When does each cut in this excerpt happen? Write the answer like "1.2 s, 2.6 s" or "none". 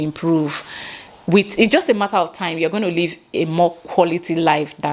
none

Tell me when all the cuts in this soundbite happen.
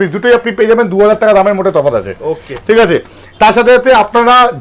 none

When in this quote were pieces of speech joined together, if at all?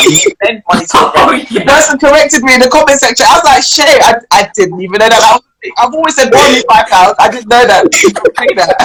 none

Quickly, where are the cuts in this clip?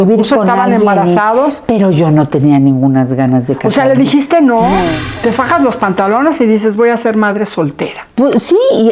5.0 s

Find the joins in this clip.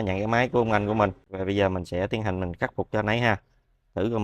1.3 s

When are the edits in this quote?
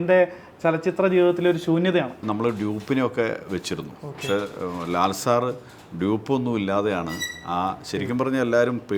2.2 s

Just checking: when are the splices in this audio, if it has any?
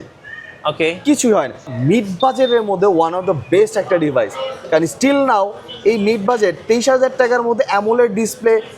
1.7 s

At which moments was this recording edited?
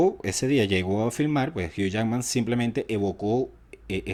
none

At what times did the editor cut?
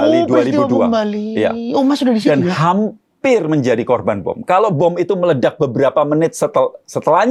none

